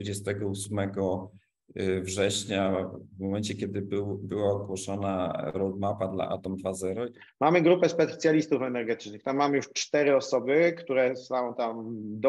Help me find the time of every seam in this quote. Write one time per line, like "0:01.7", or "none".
0:07.2